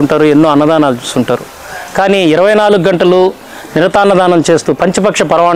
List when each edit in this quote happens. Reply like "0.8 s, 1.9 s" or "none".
none